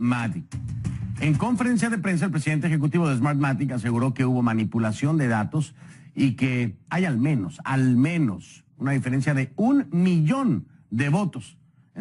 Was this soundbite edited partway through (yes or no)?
no